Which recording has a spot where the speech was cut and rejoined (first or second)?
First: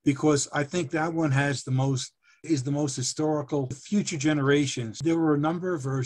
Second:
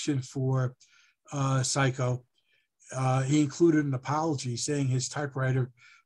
first